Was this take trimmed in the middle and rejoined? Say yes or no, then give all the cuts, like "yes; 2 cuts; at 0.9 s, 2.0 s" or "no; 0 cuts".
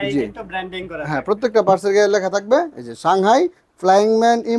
no; 0 cuts